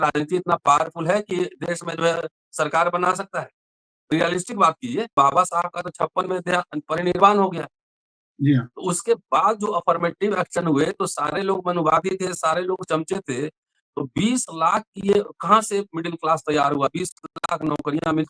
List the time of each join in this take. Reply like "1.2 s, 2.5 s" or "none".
5.1 s